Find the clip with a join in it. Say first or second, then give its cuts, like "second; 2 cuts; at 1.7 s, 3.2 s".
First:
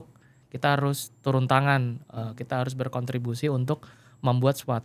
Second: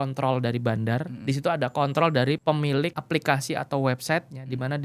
second; 2 cuts; at 1.1 s, 2.6 s